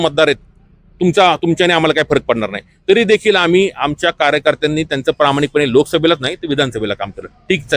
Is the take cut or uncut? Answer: uncut